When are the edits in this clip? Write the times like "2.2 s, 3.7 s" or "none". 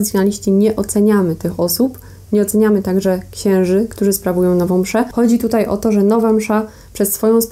5.1 s